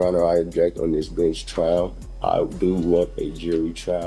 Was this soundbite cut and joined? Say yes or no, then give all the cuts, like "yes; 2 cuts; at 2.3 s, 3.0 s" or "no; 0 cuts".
yes; 1 cut; at 2.0 s